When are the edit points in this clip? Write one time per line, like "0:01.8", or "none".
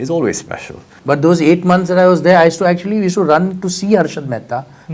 0:00.9